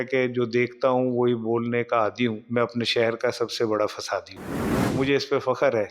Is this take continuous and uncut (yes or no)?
no